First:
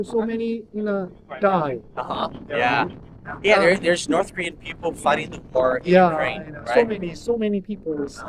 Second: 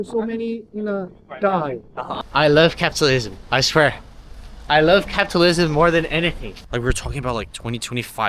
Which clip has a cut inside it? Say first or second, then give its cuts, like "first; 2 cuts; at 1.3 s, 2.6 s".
second; 2 cuts; at 2.2 s, 6.5 s